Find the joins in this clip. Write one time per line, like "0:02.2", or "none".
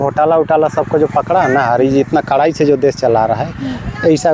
none